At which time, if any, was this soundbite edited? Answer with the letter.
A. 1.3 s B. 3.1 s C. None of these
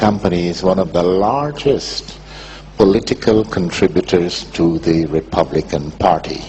B